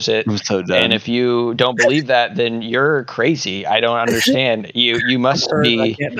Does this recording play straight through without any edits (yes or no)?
yes